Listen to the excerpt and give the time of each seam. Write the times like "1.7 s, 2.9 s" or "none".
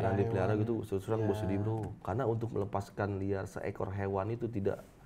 1.9 s